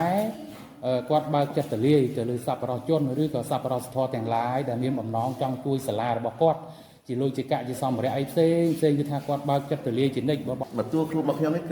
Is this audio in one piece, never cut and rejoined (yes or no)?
no